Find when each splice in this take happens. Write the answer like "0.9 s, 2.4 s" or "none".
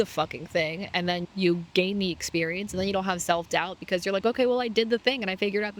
1.2 s

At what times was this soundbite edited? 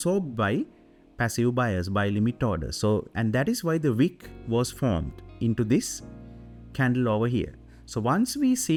none

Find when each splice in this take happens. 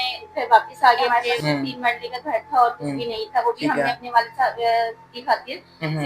1.0 s

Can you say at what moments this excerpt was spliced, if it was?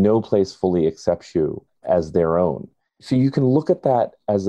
1.7 s, 3.0 s

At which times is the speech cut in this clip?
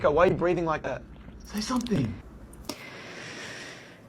none

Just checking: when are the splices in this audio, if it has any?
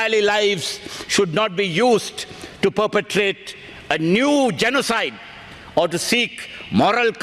none

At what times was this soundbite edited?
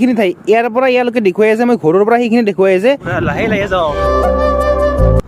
3.1 s, 4.0 s

